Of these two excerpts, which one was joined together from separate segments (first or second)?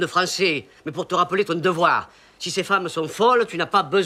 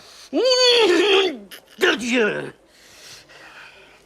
second